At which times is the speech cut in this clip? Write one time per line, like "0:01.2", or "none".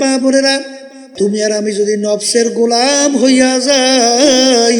0:01.1